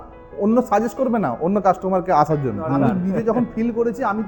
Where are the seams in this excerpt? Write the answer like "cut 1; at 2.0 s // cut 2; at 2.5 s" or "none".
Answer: cut 1; at 2.8 s